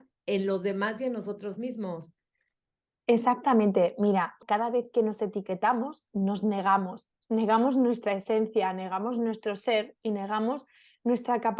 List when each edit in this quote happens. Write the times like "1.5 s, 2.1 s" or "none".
4.4 s